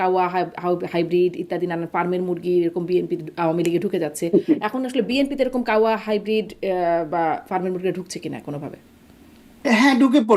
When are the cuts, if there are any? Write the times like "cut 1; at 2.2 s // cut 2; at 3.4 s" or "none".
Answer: none